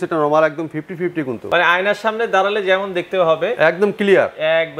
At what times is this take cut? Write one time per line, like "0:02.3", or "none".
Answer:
0:01.4